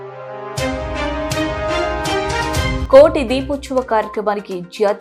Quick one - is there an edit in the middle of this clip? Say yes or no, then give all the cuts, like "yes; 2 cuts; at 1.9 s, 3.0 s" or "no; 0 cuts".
no; 0 cuts